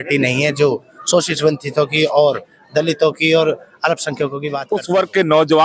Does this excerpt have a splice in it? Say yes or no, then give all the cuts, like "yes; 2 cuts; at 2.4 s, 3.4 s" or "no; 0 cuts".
yes; 1 cut; at 4.4 s